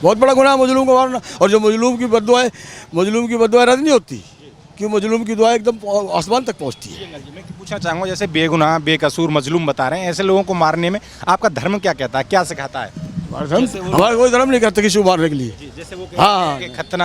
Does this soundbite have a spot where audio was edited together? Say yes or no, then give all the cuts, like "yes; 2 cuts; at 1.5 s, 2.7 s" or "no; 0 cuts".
no; 0 cuts